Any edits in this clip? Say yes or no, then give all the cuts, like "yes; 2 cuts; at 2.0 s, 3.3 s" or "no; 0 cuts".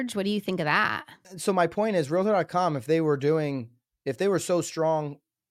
yes; 1 cut; at 1.2 s